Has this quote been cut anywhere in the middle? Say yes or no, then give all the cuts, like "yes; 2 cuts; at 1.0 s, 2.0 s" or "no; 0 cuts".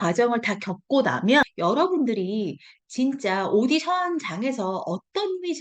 yes; 1 cut; at 1.5 s